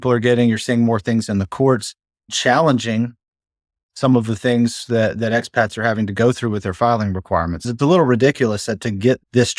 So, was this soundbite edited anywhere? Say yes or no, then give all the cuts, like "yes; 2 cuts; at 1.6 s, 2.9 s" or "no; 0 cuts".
yes; 1 cut; at 7.6 s